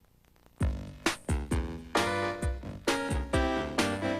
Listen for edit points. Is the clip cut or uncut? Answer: cut